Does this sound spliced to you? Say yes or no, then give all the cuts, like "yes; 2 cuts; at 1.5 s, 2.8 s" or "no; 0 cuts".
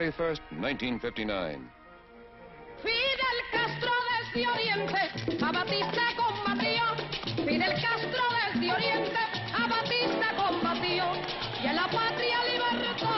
no; 0 cuts